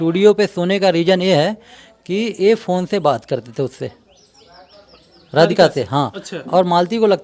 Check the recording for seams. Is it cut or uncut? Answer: uncut